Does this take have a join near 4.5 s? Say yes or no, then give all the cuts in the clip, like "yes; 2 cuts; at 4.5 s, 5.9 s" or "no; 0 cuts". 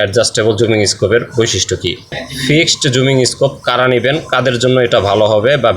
no; 1 cut; at 2.1 s